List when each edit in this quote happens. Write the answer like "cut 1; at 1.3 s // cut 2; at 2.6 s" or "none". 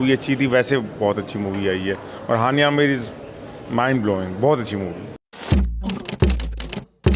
none